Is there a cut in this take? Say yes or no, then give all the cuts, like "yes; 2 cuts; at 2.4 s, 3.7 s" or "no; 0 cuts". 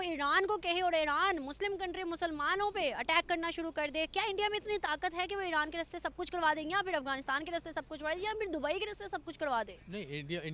no; 0 cuts